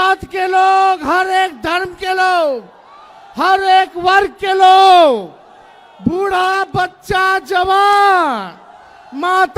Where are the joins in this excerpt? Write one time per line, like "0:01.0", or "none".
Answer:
none

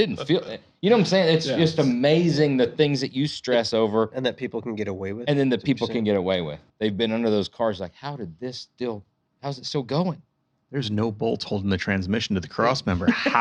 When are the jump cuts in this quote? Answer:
0:06.6

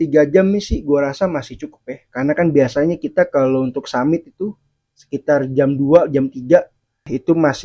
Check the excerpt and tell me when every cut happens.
none

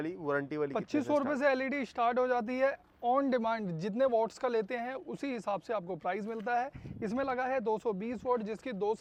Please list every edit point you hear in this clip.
none

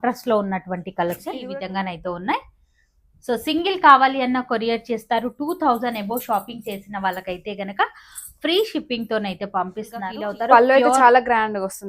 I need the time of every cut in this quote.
0:01.4
0:10.1

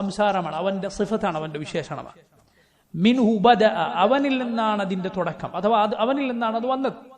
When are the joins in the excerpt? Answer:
none

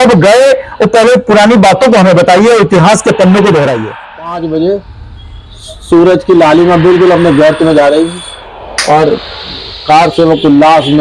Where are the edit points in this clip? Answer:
0:04.1

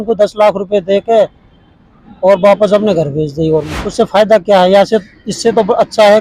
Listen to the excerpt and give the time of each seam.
0:03.8

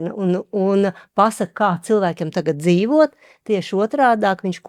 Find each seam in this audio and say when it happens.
none

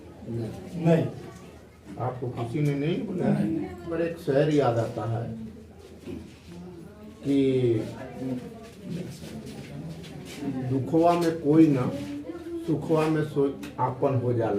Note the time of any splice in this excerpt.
0:03.9

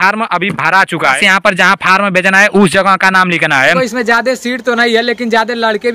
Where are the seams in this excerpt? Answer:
0:01.2
0:03.8

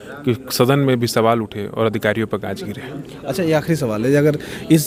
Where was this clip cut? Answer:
none

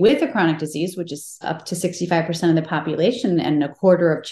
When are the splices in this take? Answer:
0:01.3

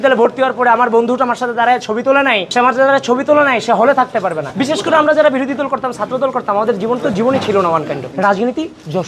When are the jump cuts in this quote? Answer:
0:02.5
0:04.4
0:08.1

